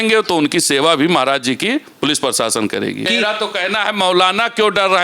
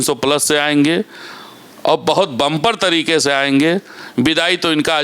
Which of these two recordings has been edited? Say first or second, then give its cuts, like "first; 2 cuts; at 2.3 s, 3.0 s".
first; 1 cut; at 3.1 s